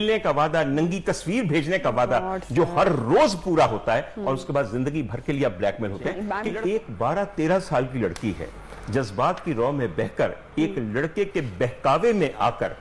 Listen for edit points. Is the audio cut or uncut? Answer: cut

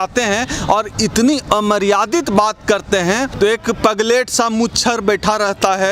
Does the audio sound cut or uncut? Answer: cut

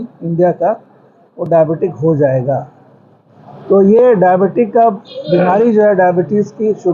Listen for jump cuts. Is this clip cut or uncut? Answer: uncut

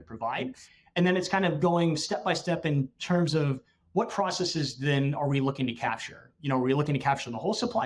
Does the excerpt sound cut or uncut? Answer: uncut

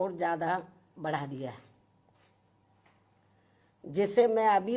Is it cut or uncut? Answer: uncut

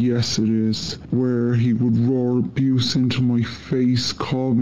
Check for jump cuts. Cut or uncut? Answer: cut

